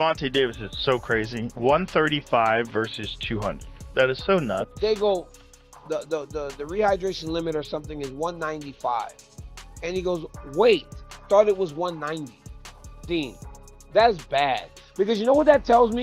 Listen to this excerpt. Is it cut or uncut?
cut